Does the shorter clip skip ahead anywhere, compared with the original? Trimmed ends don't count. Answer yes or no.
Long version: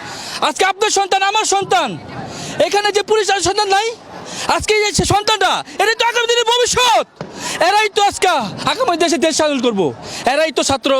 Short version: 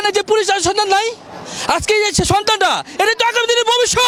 no